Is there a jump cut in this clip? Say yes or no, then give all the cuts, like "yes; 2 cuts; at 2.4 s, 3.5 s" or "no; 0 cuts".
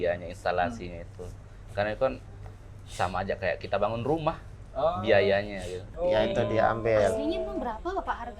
yes; 1 cut; at 5.9 s